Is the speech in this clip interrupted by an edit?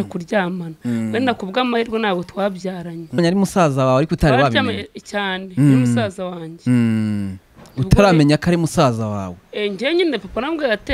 yes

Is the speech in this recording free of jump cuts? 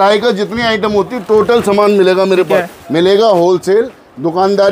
yes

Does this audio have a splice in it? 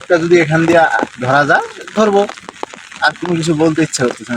no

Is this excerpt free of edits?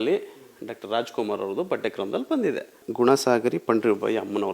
no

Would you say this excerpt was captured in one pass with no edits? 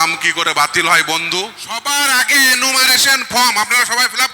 no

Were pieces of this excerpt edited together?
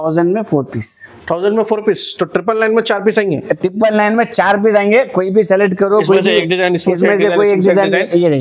no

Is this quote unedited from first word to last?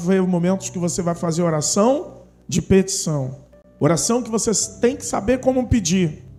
yes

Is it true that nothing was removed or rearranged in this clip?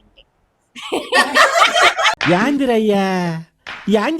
no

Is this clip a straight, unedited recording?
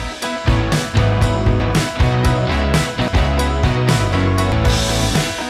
no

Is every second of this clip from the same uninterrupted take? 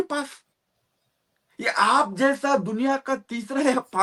yes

